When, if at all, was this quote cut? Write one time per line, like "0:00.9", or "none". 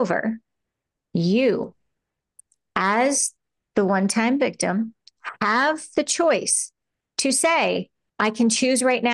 0:08.0